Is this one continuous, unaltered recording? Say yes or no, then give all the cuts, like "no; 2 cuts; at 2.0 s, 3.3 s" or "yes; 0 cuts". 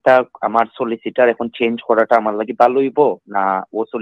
yes; 0 cuts